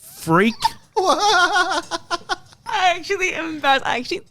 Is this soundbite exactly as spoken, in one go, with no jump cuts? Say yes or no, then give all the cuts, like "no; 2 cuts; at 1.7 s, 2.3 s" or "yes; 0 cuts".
no; 1 cut; at 2.6 s